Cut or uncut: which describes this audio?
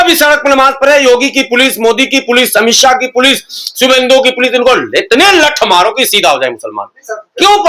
uncut